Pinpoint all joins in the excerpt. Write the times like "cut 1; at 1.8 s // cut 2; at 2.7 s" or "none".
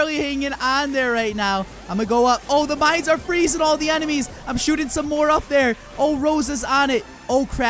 none